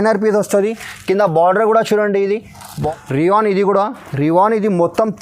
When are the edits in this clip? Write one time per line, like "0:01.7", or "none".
0:02.8